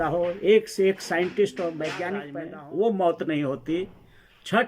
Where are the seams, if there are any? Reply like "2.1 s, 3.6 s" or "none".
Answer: 2.3 s

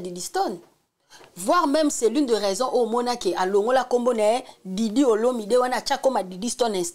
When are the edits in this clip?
none

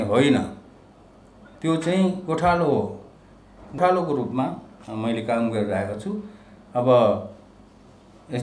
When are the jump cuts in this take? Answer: 3.7 s

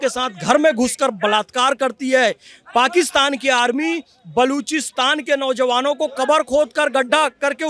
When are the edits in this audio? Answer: none

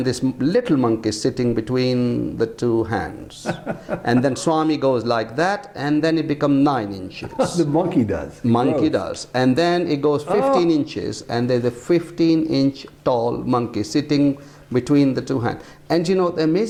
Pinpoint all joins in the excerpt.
none

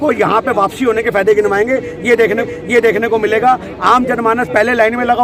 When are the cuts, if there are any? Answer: none

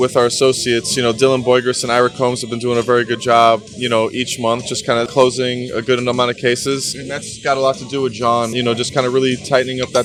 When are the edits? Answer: none

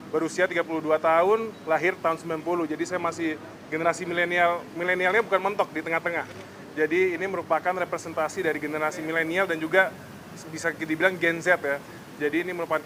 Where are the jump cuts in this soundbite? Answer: none

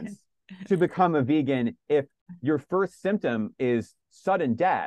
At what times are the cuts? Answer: 2.2 s

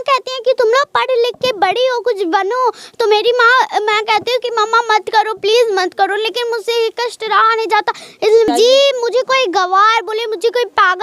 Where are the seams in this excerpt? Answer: 8.5 s

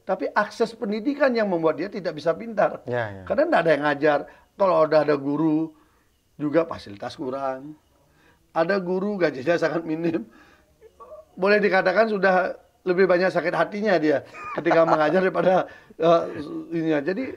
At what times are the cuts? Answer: none

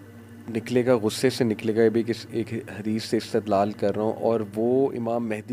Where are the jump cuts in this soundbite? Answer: none

